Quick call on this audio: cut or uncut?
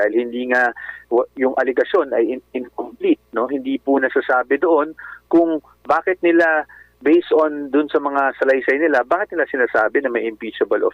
uncut